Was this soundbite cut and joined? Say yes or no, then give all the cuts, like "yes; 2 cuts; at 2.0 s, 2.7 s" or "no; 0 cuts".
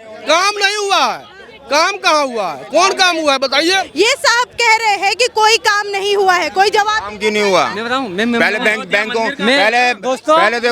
yes; 1 cut; at 3.9 s